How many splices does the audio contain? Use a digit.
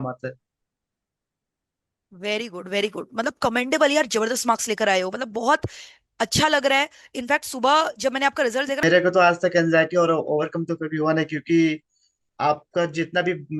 1